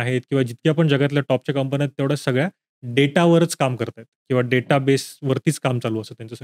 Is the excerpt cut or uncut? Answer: uncut